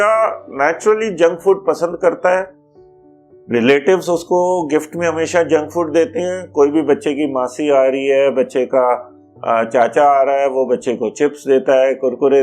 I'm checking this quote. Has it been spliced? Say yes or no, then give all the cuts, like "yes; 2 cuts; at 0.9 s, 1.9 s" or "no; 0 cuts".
no; 0 cuts